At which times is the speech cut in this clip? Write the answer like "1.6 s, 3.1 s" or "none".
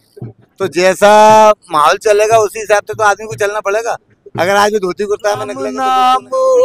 5.7 s